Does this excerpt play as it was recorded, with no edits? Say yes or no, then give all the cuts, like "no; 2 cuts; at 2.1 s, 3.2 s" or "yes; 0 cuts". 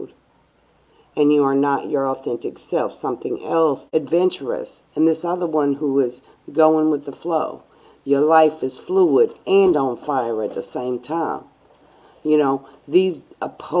no; 1 cut; at 3.8 s